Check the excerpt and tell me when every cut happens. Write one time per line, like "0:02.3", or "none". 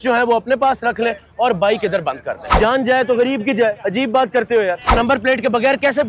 0:02.6
0:04.9